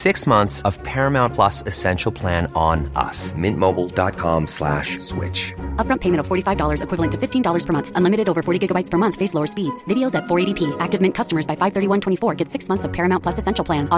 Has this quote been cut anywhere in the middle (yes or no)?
no